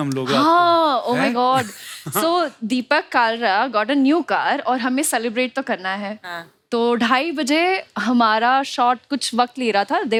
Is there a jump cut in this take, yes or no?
no